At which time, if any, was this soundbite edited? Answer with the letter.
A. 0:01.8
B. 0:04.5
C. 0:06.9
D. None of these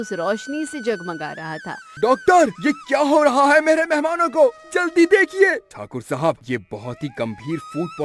A